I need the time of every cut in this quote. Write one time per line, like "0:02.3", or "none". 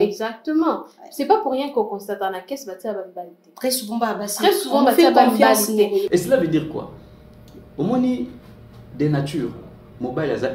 0:06.1